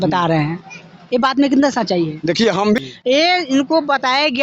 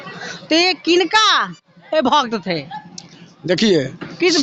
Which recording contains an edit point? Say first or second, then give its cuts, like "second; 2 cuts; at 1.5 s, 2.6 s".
first; 1 cut; at 2.8 s